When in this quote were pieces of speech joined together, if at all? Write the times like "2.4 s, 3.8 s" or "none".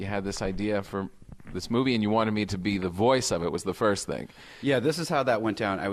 4.0 s